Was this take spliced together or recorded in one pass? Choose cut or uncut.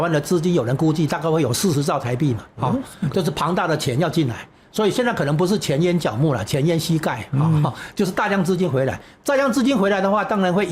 uncut